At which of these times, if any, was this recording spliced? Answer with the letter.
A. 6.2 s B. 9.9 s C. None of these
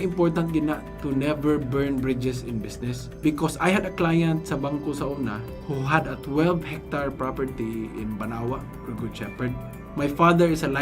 B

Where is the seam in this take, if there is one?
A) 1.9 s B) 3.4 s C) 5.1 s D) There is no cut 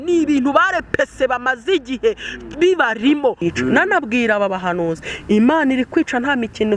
B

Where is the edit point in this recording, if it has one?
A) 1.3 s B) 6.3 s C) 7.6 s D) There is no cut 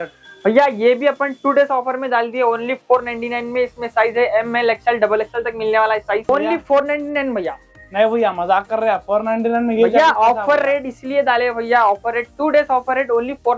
B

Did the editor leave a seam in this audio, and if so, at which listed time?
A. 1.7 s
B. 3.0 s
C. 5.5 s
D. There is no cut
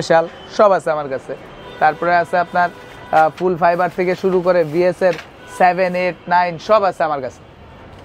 D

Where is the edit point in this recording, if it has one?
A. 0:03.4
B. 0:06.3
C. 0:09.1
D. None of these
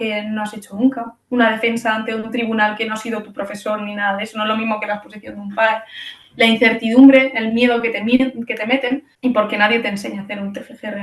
C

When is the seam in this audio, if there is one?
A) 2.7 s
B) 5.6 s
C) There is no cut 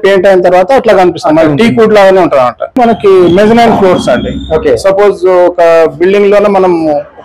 A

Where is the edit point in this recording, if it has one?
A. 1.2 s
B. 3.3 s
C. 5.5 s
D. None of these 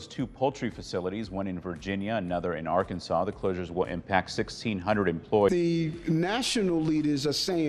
C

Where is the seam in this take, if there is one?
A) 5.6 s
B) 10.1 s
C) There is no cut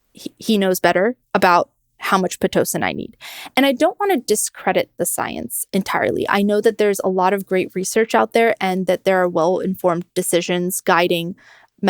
A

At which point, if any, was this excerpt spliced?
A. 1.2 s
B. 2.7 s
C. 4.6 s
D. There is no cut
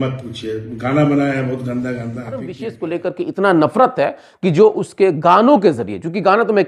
B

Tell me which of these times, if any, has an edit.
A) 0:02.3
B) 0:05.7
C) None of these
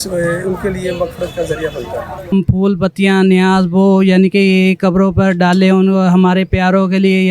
A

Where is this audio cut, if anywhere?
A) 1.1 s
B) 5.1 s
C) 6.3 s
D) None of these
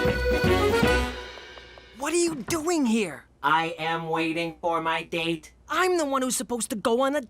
A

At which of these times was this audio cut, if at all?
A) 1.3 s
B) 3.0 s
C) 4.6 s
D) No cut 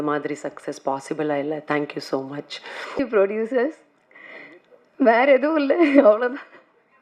B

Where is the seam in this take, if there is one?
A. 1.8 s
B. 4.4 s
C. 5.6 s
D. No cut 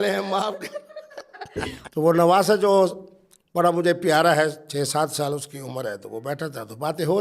A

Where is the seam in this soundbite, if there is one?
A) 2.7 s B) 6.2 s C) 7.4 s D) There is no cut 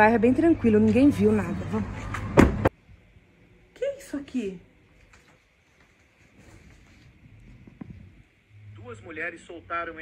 A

